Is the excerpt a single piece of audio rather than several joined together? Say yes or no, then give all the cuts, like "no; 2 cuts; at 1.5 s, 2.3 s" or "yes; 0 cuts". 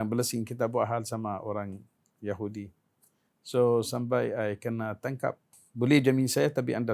no; 1 cut; at 5.6 s